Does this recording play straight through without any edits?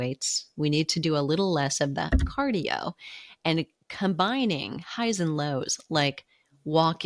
yes; 0 cuts

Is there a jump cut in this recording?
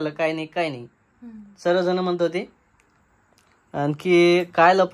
no; 0 cuts

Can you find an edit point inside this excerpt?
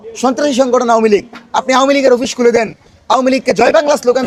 no; 0 cuts

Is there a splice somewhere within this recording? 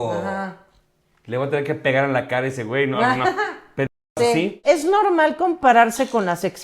yes; 1 cut; at 4.6 s

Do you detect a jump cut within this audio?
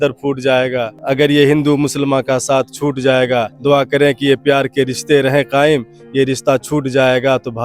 yes; 2 cuts; at 1.0 s, 3.5 s

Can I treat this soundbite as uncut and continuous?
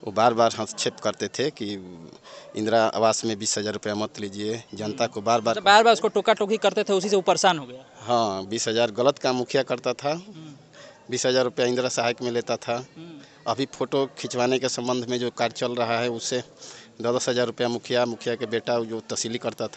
yes; 0 cuts

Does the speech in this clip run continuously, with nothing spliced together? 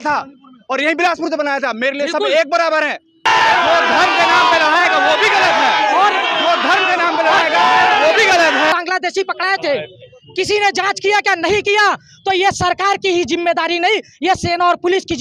no; 2 cuts; at 3.3 s, 8.7 s

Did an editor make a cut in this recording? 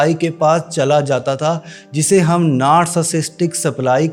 no; 0 cuts

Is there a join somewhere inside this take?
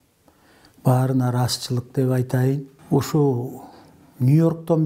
yes; 1 cut; at 2.7 s

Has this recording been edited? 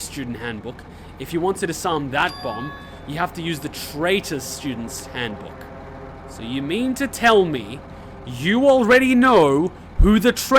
yes; 1 cut; at 6.1 s

